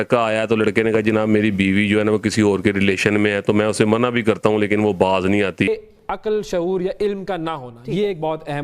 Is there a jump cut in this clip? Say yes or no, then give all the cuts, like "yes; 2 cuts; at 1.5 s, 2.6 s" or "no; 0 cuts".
yes; 1 cut; at 5.7 s